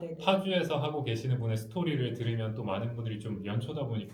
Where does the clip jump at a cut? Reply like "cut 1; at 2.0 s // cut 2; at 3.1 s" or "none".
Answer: none